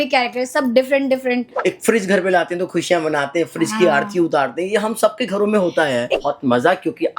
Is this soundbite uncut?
no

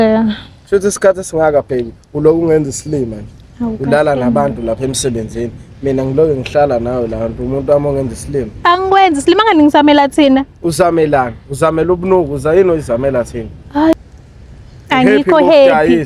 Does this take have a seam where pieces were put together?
yes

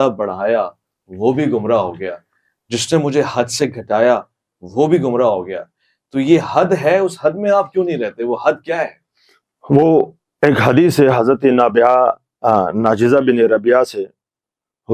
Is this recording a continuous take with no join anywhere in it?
yes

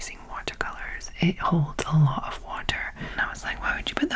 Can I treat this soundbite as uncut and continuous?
no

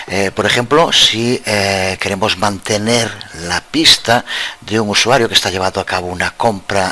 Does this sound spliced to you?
no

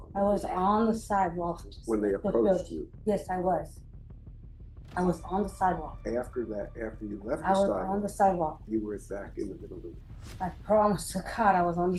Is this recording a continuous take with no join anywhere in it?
yes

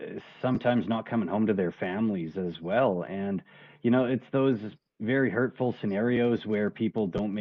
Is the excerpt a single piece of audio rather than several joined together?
yes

